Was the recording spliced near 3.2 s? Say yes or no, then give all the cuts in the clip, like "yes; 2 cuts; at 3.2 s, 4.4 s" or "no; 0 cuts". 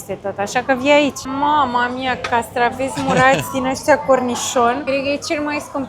no; 2 cuts; at 1.2 s, 4.8 s